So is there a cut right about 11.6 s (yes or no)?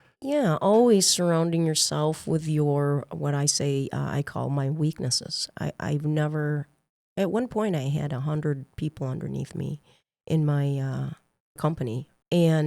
yes